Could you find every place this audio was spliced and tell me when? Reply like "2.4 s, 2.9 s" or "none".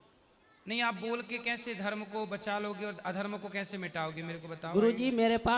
none